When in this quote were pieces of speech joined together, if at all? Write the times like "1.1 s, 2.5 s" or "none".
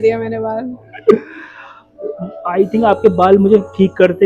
none